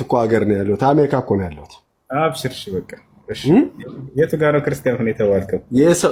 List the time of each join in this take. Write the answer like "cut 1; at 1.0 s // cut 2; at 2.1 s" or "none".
none

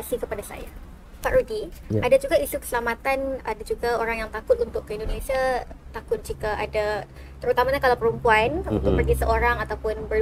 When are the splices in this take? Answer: cut 1; at 1.2 s

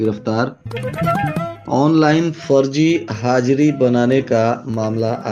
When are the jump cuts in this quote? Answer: none

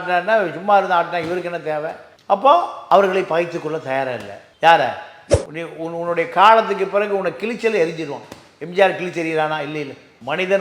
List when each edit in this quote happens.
cut 1; at 5.3 s

